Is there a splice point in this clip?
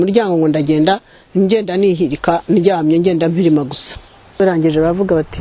yes; 1 cut; at 4.4 s

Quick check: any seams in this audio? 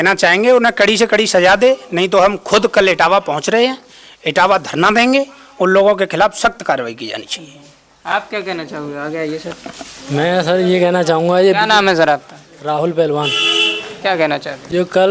no; 0 cuts

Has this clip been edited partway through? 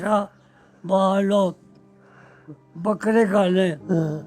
no; 0 cuts

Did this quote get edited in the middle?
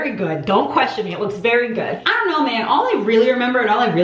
yes; 1 cut; at 2.1 s

